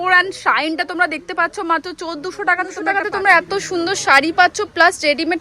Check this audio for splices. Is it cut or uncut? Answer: cut